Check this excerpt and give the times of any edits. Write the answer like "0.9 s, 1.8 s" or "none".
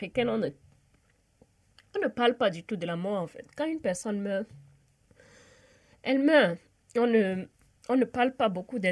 none